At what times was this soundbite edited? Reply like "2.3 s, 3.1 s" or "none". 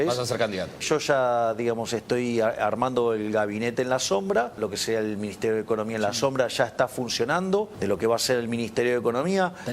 0.8 s, 4.6 s, 7.7 s